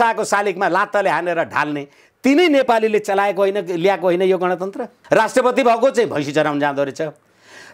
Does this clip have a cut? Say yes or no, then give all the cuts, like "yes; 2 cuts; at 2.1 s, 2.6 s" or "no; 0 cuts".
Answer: yes; 1 cut; at 4.9 s